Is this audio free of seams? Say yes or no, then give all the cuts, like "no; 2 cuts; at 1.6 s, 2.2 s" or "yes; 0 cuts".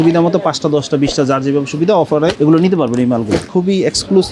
no; 2 cuts; at 2.3 s, 3.5 s